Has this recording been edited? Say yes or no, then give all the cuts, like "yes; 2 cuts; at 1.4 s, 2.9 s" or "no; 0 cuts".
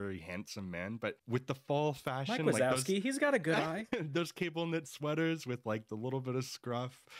yes; 1 cut; at 1.2 s